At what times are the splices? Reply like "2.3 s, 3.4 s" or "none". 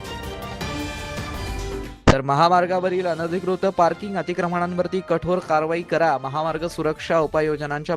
1.9 s